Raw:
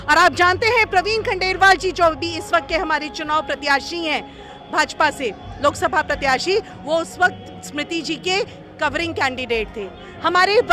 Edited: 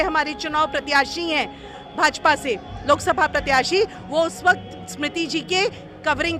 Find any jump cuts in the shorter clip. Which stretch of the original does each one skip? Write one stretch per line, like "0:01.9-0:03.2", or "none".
none